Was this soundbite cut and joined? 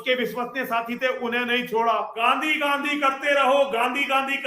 yes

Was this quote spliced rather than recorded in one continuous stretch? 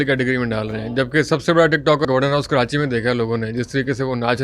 yes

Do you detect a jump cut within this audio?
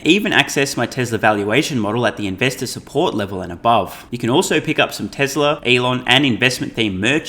yes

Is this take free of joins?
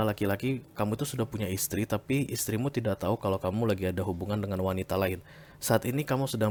yes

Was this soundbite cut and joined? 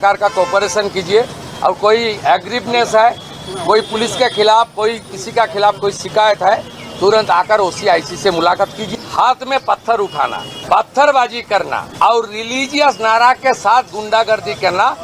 yes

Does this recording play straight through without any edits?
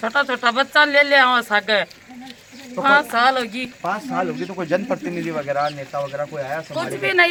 yes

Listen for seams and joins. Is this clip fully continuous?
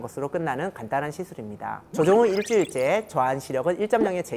yes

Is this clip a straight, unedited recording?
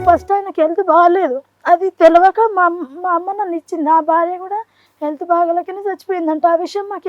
yes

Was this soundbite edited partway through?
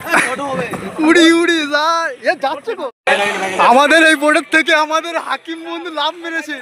yes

